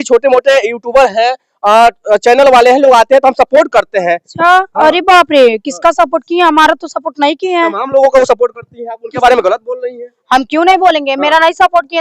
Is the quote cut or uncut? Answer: uncut